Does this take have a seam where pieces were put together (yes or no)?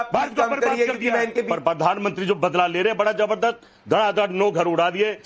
yes